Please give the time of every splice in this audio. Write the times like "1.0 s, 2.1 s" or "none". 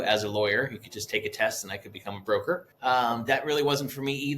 2.7 s